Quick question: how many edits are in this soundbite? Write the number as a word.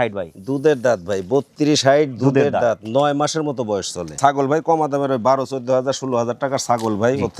one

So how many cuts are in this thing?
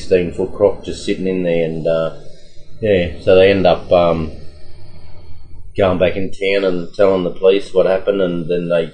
zero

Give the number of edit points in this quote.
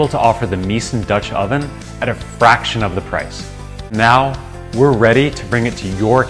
one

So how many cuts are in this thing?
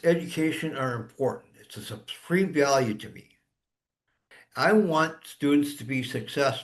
zero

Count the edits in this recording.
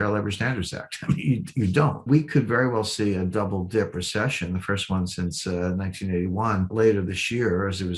two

